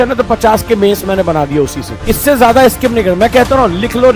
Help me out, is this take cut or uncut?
cut